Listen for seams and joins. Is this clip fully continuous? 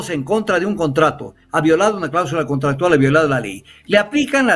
yes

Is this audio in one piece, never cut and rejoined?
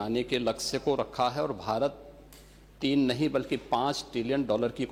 yes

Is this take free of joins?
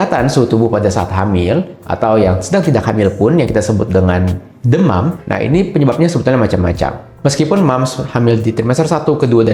yes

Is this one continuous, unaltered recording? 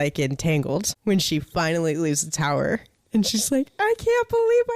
no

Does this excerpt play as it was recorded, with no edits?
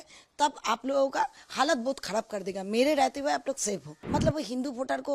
no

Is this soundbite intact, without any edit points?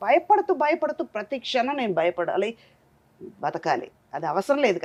yes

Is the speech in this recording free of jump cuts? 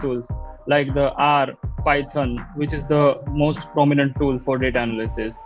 yes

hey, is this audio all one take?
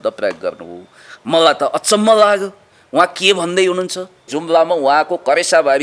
no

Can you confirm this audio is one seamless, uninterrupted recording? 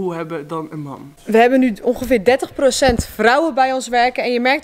no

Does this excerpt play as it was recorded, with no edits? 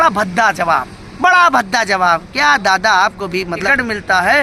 no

